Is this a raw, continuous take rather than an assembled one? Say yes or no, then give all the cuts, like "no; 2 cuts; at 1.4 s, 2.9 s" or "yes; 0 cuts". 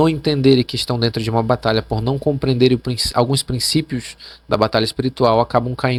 yes; 0 cuts